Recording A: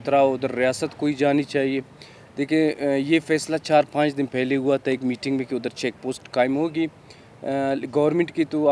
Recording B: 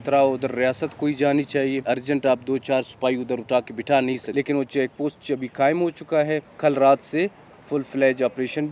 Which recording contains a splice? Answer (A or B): B